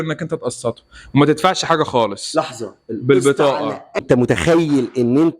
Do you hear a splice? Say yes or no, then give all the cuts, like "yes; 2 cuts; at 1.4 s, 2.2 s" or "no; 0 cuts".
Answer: yes; 1 cut; at 4.0 s